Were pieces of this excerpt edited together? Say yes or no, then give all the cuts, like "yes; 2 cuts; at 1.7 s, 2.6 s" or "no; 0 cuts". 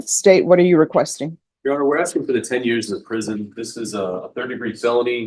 no; 0 cuts